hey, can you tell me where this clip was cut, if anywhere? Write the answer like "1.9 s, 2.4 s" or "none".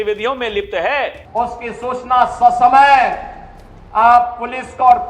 1.2 s